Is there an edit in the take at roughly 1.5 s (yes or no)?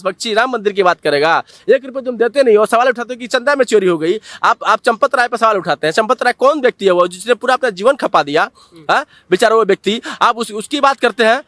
no